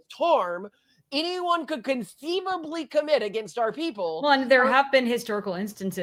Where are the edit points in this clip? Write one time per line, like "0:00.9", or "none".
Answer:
none